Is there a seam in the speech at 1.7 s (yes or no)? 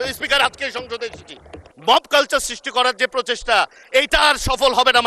yes